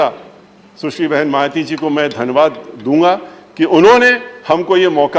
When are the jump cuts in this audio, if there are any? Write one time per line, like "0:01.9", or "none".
none